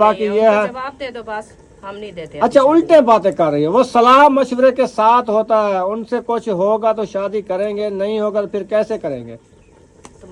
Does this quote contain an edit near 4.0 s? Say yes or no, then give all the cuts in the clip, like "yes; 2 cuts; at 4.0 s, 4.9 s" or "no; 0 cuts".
no; 0 cuts